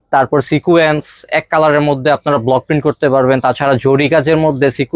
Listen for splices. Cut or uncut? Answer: uncut